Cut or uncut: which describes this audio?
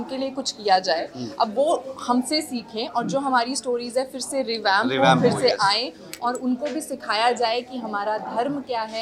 uncut